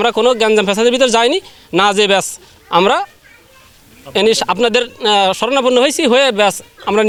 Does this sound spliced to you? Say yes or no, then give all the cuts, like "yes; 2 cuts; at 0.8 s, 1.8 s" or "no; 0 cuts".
no; 0 cuts